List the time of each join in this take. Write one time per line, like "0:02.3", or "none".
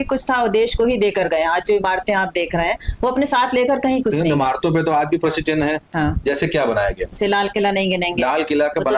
0:05.9